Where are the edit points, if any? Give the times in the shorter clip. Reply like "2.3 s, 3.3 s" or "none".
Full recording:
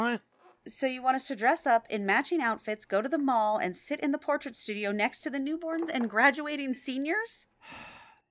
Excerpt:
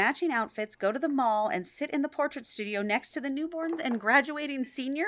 none